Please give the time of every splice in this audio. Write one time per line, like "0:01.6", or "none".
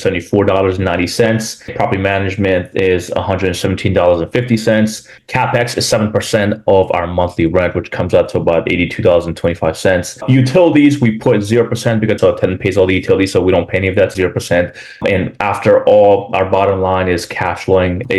0:01.7
0:12.2